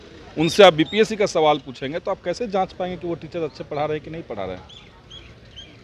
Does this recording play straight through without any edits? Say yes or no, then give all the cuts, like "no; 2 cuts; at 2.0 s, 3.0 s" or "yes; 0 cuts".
yes; 0 cuts